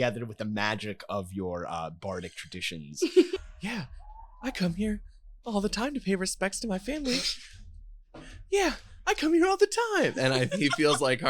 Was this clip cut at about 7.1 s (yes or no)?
no